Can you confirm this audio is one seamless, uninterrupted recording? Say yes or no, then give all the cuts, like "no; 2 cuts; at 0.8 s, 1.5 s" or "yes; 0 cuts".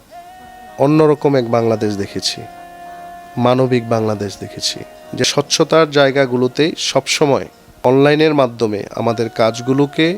no; 2 cuts; at 5.3 s, 7.6 s